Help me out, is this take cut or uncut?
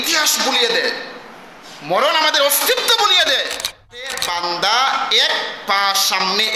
cut